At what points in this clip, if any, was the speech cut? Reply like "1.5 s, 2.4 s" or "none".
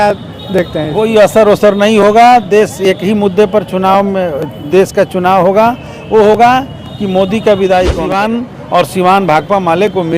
8.1 s